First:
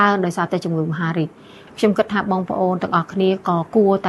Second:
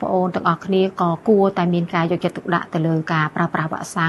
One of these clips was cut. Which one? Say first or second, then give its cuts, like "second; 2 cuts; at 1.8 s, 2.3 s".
first; 1 cut; at 1.6 s